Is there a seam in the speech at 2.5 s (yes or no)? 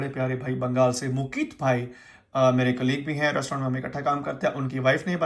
no